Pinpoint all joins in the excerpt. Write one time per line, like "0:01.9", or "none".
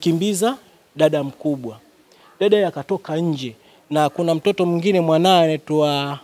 none